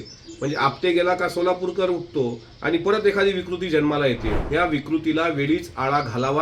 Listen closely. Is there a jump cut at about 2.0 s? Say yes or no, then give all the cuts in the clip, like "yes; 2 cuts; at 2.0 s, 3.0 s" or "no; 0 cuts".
no; 1 cut; at 4.3 s